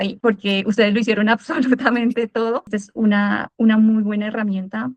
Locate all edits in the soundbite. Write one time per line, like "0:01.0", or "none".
0:02.7